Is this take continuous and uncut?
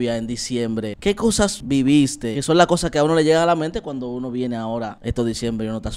no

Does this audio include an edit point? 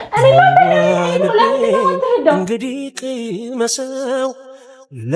no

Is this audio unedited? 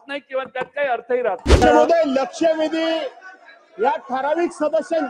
no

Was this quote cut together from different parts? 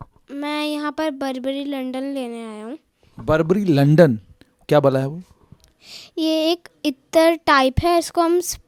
no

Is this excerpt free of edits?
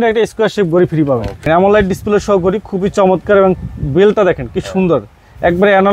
no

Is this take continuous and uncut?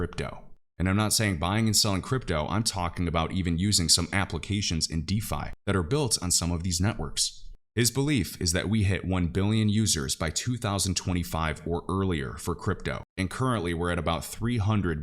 no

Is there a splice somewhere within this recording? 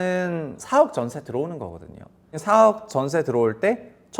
yes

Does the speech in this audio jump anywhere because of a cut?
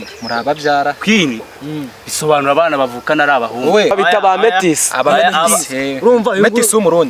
yes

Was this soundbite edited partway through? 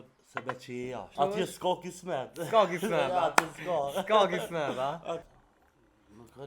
yes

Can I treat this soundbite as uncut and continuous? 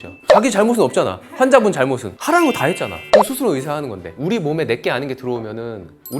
no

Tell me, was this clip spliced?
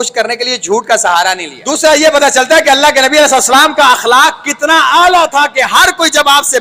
yes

